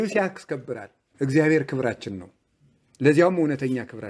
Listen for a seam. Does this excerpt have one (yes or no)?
yes